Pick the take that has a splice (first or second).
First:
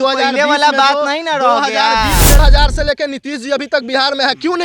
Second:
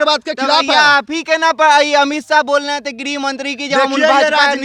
first